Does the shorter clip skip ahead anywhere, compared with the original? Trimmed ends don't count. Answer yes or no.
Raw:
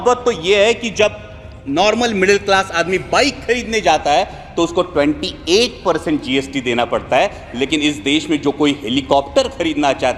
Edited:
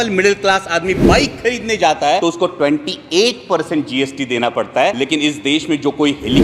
yes